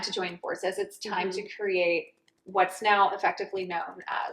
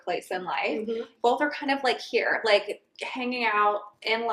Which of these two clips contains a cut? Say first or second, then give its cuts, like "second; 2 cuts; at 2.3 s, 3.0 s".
second; 1 cut; at 1.1 s